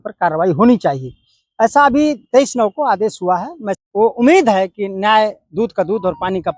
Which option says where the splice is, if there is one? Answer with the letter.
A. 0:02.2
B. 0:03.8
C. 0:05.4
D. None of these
B